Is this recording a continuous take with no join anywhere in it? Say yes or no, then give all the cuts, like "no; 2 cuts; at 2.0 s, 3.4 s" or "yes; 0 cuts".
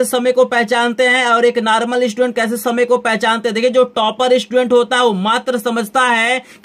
yes; 0 cuts